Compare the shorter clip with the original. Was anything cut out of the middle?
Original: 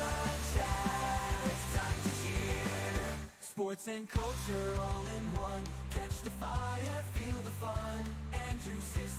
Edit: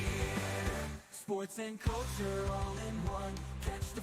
no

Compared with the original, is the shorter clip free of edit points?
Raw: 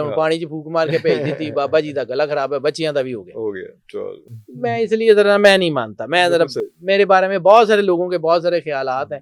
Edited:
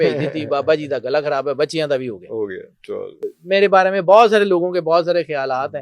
no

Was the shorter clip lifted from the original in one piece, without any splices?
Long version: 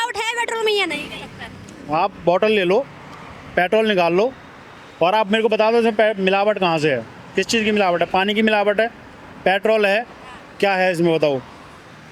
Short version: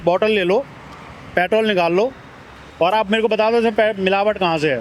yes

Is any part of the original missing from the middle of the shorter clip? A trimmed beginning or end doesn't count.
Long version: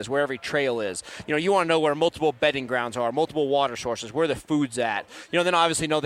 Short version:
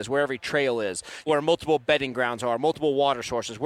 yes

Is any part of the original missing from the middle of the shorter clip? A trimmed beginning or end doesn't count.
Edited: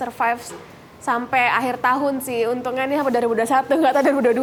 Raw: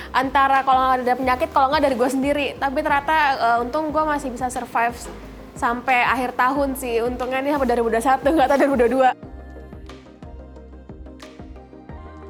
no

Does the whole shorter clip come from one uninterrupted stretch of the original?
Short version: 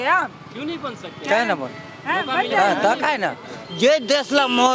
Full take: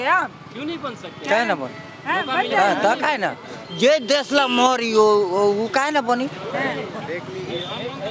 yes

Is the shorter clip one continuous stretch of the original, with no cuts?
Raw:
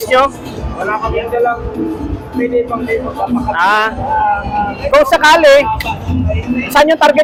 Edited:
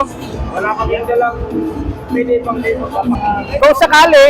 no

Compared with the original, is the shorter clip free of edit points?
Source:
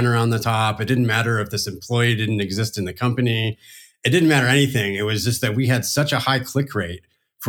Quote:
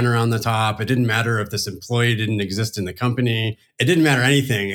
no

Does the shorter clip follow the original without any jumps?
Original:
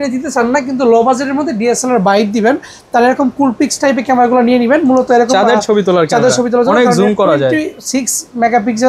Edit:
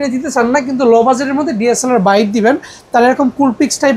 yes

